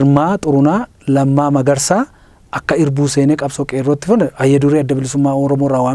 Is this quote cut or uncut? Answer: uncut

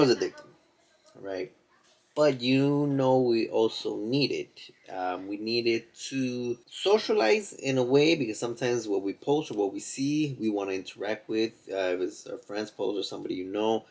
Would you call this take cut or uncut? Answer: cut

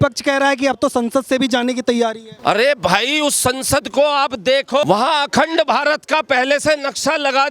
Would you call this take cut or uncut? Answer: cut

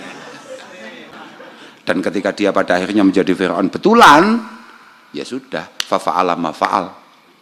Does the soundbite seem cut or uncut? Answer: cut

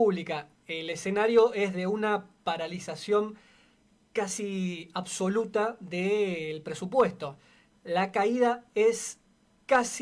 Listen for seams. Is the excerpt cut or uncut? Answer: uncut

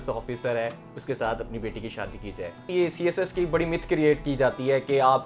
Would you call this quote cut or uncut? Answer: cut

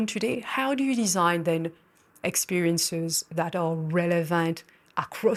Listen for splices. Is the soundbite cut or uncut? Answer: uncut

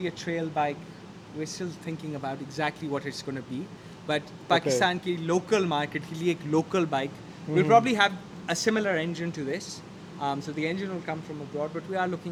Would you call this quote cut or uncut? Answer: uncut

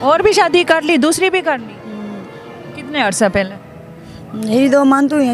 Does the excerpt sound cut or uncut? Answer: uncut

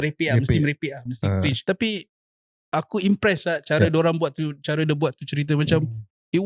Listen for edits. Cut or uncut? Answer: cut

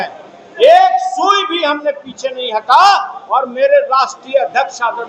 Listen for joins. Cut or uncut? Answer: uncut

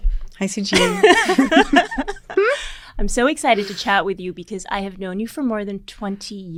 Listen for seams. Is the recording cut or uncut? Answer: uncut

